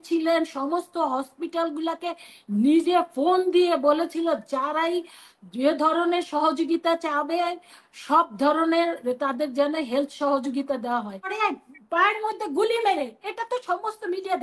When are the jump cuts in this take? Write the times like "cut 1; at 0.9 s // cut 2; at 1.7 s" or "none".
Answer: cut 1; at 11.3 s